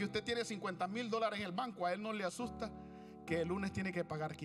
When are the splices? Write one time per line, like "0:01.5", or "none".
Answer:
none